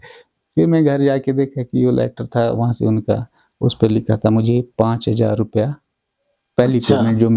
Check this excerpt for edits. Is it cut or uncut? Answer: uncut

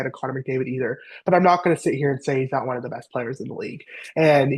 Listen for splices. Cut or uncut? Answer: uncut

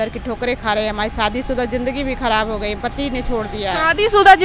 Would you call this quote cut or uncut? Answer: uncut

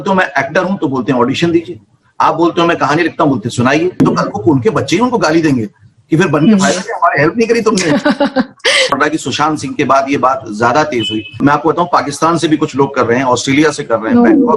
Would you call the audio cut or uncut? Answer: cut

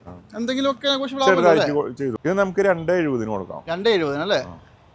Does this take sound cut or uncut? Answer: cut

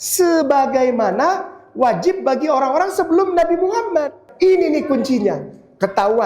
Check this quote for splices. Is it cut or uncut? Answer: cut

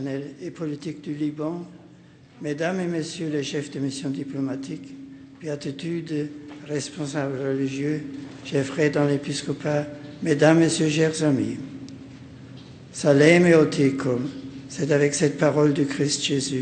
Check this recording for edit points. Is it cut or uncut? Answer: uncut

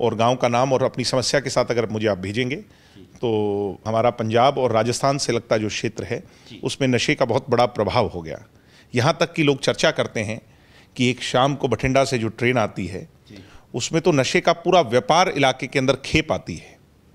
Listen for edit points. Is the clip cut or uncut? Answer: cut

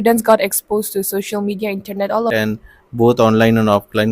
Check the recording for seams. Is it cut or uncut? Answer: cut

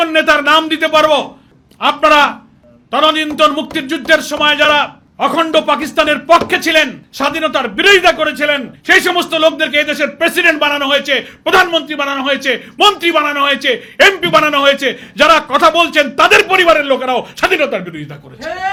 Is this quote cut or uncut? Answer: uncut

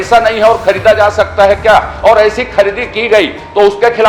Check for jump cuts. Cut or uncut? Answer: uncut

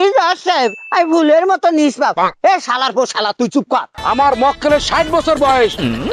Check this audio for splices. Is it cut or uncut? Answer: cut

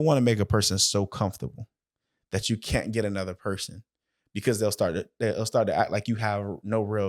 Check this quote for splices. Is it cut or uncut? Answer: uncut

